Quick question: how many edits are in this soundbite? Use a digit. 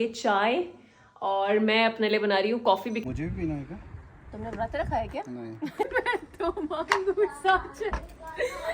2